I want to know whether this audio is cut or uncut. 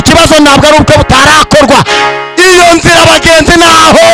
uncut